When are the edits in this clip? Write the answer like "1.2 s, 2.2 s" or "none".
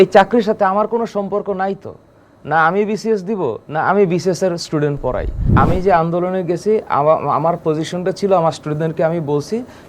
5.4 s